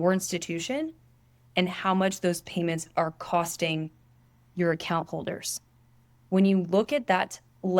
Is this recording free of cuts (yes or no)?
yes